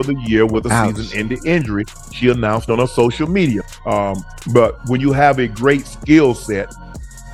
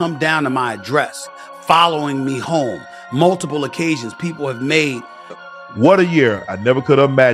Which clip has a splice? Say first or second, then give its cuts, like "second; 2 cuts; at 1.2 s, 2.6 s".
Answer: second; 1 cut; at 5.2 s